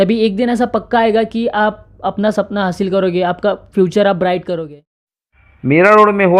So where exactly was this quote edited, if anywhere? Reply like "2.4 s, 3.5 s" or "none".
5.4 s